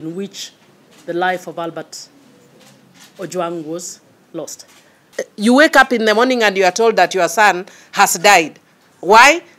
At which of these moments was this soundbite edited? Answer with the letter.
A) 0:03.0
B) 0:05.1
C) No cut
B